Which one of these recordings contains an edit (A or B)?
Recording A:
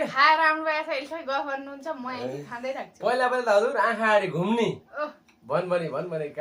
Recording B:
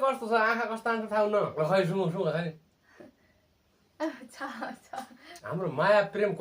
B